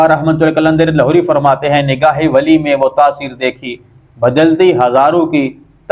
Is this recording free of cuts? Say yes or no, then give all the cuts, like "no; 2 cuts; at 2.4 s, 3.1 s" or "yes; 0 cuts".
yes; 0 cuts